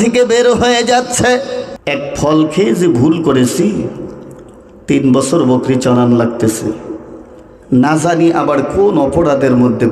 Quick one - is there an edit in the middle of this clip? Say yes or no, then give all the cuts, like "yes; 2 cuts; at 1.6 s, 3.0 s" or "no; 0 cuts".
yes; 1 cut; at 1.7 s